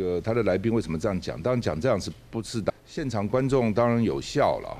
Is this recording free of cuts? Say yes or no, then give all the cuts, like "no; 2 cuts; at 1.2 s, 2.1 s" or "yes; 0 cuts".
no; 1 cut; at 2.7 s